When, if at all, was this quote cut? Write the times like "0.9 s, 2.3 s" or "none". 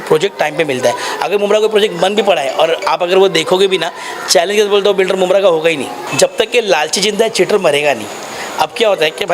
6.0 s